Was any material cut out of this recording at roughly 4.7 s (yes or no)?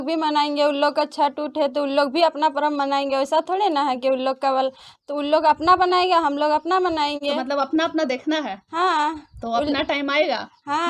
no